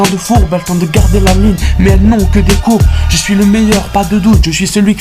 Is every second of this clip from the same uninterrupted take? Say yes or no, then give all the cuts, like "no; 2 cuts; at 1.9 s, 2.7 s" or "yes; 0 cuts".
no; 1 cut; at 4.1 s